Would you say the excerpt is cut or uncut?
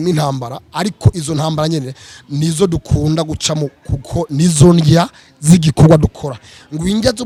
uncut